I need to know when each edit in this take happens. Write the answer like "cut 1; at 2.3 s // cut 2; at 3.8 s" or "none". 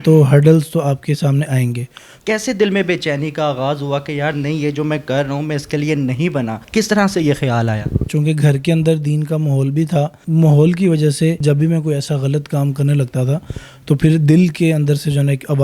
cut 1; at 2.1 s // cut 2; at 6.6 s // cut 3; at 8.1 s // cut 4; at 10.2 s // cut 5; at 11.4 s